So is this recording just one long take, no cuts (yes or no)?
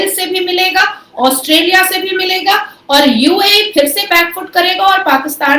yes